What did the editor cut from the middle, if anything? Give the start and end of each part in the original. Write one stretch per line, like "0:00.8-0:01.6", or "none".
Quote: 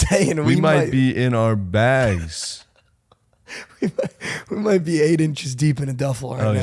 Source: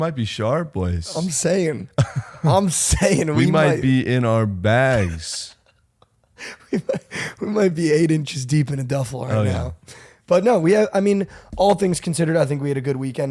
none